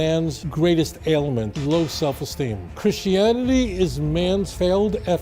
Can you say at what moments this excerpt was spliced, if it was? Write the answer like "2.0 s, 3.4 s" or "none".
3.7 s